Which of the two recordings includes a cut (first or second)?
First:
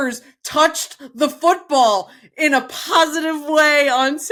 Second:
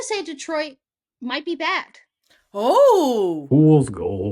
second